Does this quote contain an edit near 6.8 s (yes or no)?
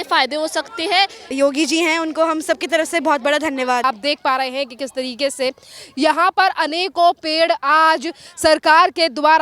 no